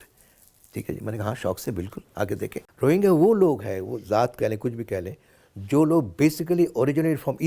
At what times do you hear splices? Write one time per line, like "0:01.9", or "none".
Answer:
0:02.6